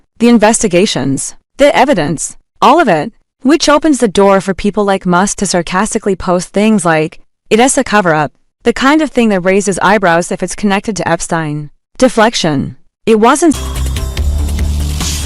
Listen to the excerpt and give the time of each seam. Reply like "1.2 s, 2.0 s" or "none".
13.6 s

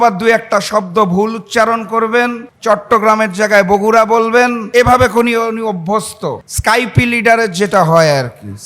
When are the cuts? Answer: 2.5 s, 4.6 s, 6.5 s

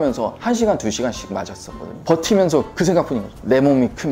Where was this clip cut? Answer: 2.0 s

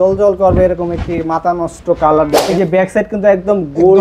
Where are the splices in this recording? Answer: 2.6 s

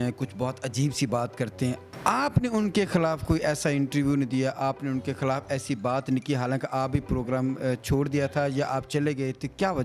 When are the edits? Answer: none

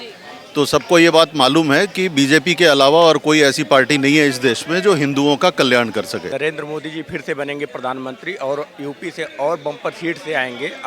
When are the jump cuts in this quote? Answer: 6.3 s

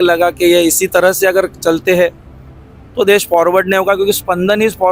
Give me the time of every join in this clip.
none

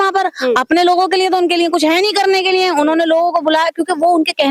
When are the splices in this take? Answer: none

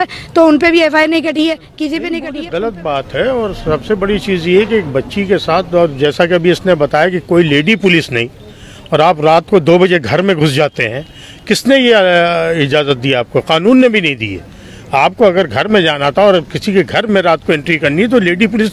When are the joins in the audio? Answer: 2.3 s

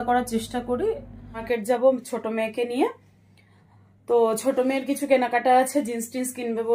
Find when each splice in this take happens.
1.4 s

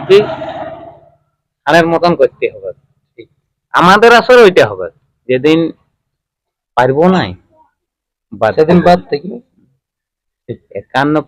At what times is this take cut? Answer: none

